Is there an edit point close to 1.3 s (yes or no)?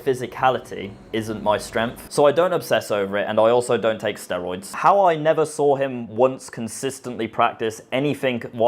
no